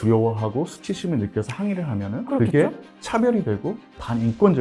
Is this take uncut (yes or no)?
yes